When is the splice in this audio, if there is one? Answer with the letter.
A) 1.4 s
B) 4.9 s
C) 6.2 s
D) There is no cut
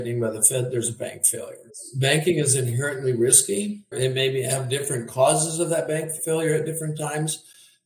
C